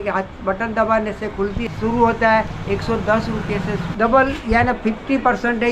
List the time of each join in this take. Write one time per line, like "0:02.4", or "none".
0:01.6
0:03.9